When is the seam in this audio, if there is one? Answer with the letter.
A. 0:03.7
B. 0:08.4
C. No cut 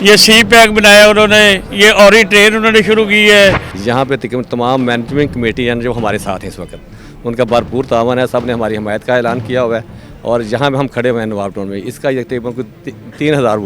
A